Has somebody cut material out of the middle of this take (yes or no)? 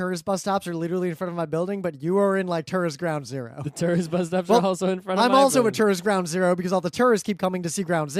yes